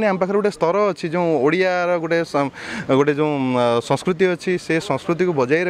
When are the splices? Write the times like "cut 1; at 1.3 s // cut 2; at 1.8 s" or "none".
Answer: none